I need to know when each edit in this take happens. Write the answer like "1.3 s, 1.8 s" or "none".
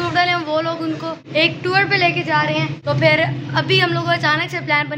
1.2 s, 2.8 s